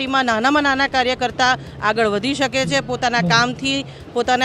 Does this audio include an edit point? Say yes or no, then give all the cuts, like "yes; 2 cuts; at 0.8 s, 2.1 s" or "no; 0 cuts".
no; 0 cuts